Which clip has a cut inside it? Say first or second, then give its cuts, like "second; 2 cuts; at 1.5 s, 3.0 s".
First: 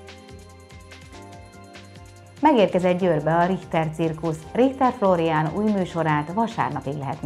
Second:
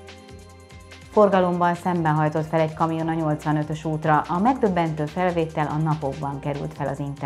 second; 1 cut; at 1.0 s